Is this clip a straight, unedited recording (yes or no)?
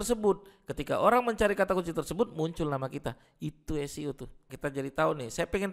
no